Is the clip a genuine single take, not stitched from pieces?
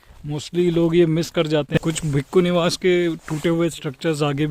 no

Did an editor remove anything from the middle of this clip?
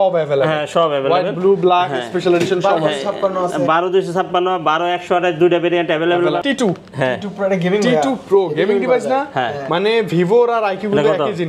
yes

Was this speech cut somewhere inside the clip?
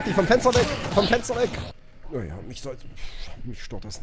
yes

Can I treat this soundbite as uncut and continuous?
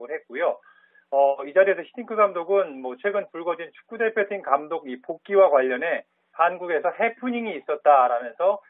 no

